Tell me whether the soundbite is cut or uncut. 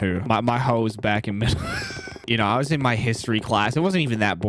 cut